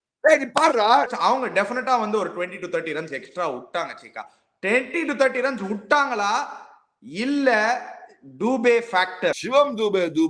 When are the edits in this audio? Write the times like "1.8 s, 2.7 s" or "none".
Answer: 1.1 s, 9.4 s